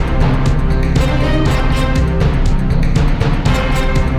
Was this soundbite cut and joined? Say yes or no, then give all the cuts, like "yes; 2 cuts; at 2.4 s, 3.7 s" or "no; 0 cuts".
no; 0 cuts